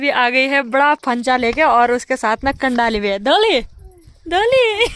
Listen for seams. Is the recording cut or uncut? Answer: uncut